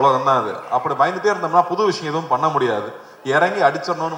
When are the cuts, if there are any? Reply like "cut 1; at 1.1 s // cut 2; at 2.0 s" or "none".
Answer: none